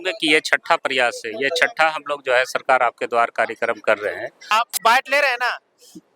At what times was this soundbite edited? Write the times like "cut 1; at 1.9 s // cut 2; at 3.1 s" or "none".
cut 1; at 4.5 s